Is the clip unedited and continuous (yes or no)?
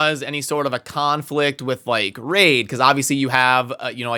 yes